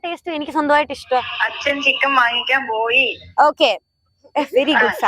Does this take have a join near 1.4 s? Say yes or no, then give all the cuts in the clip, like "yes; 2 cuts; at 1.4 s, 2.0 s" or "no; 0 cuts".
yes; 1 cut; at 1.4 s